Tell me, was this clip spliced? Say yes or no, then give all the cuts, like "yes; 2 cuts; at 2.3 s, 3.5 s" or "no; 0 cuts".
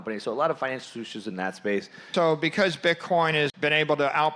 yes; 2 cuts; at 2.1 s, 3.5 s